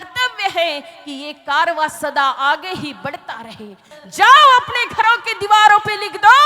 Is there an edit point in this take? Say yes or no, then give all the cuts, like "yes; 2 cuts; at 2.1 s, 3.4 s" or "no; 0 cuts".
yes; 1 cut; at 4.0 s